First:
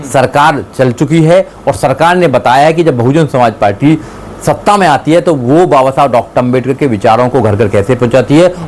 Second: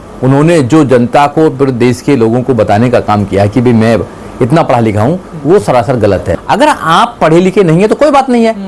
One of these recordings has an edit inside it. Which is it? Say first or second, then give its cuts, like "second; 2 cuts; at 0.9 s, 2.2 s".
second; 1 cut; at 6.3 s